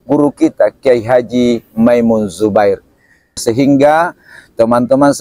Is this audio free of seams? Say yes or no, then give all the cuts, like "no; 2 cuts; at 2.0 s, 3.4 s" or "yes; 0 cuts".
no; 1 cut; at 3.4 s